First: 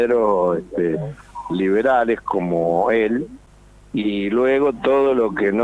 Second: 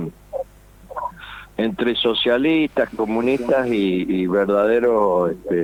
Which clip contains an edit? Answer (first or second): first